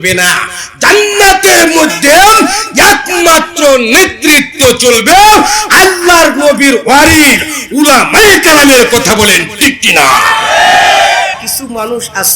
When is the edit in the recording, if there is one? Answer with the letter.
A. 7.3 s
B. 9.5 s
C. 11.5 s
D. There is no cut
C